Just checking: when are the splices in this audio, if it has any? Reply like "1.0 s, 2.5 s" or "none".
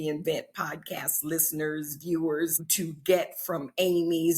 2.6 s